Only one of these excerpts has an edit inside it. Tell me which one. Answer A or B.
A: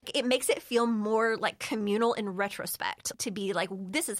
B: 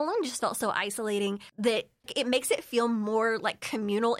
A